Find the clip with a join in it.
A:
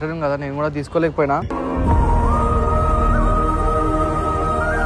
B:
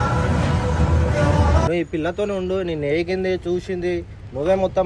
B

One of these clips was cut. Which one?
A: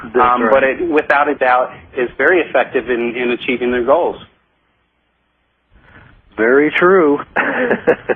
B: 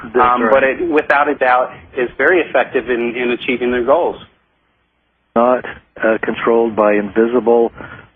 A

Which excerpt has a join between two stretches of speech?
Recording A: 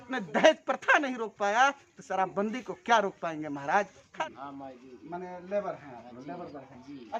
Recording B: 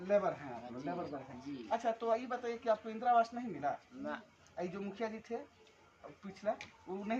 A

